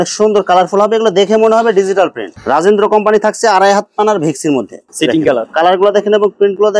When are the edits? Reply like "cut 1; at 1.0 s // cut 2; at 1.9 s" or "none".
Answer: cut 1; at 2.4 s // cut 2; at 4.8 s